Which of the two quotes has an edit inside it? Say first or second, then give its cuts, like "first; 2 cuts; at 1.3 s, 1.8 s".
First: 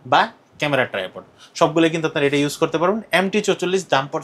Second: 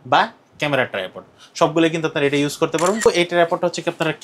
second; 1 cut; at 3.1 s